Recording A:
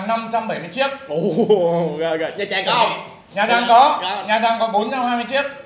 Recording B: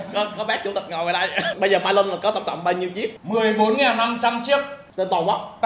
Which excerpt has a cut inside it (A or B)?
B